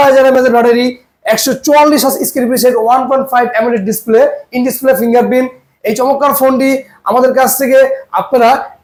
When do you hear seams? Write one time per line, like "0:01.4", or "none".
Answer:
none

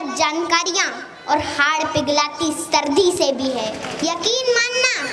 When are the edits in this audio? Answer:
0:03.9

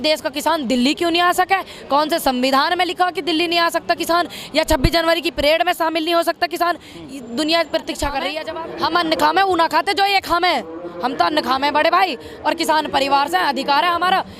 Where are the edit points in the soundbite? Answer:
0:08.4

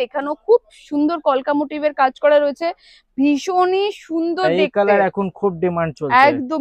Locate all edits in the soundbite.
none

